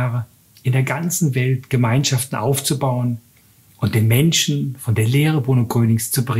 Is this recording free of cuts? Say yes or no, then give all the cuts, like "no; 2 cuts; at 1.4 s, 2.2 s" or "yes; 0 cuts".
yes; 0 cuts